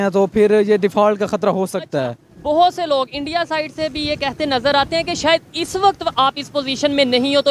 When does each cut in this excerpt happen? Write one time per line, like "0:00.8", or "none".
none